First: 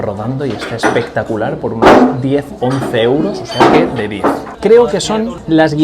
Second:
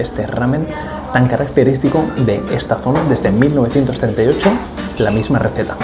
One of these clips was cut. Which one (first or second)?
first